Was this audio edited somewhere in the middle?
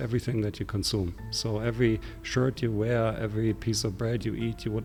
no; 0 cuts

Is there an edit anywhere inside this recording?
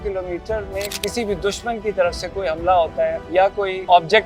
yes; 2 cuts; at 0.9 s, 3.4 s

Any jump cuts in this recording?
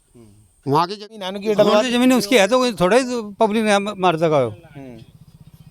yes; 1 cut; at 1.2 s

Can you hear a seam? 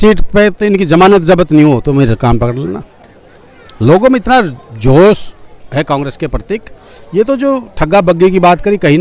no; 0 cuts

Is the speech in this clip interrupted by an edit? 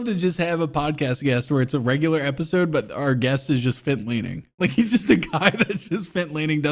no; 0 cuts

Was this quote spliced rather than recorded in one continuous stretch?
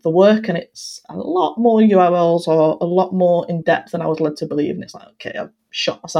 no; 0 cuts

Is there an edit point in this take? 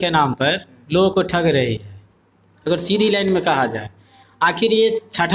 no; 0 cuts

